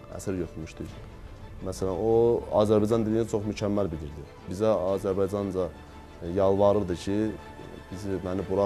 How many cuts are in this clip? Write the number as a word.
one